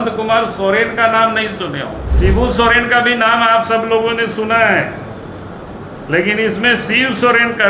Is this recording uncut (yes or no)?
no